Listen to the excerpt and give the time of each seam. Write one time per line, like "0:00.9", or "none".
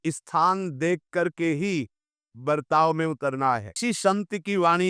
0:03.8